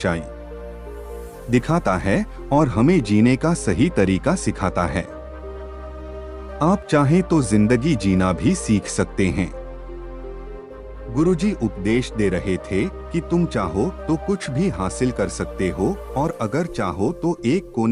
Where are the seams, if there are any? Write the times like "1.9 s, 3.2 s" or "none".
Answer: 9.6 s, 11.1 s